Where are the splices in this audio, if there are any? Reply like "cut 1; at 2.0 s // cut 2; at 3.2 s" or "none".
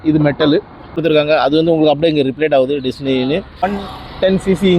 cut 1; at 0.9 s // cut 2; at 3.7 s